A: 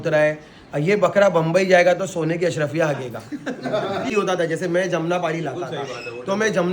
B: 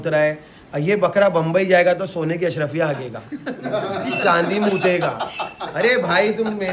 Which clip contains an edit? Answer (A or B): A